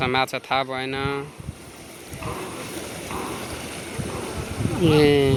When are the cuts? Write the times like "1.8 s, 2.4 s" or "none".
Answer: none